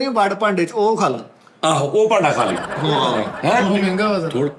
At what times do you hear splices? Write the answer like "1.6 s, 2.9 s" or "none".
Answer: none